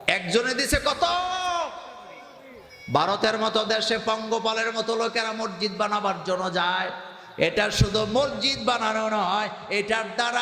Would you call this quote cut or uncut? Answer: uncut